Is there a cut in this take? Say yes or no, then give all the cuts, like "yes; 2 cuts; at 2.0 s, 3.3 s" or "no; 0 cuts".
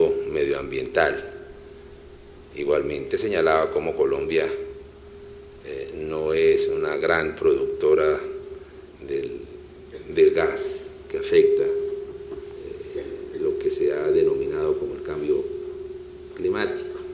yes; 1 cut; at 5.7 s